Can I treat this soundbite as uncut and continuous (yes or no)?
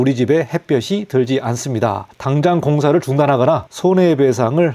no